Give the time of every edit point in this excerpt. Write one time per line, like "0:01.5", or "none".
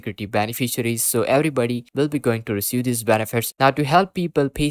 0:03.5